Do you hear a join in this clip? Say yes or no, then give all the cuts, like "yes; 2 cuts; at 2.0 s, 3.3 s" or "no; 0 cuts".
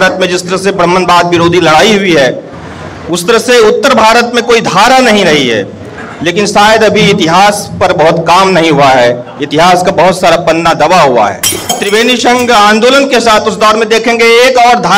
yes; 1 cut; at 11.8 s